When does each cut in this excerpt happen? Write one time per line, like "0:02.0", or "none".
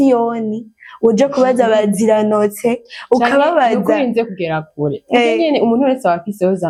none